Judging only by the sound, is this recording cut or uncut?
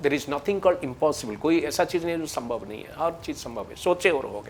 uncut